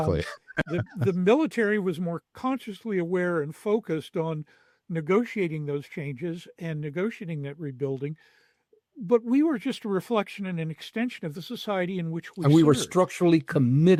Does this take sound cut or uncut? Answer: uncut